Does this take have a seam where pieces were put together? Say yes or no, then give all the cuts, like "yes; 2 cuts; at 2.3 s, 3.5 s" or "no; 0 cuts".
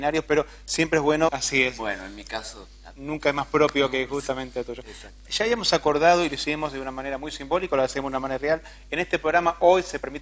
no; 0 cuts